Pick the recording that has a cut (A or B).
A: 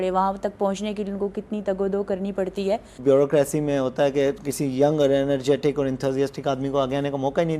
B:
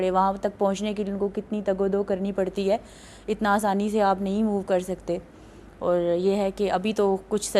A